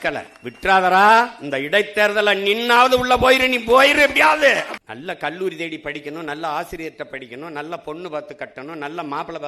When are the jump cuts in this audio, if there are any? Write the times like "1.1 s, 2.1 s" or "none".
4.7 s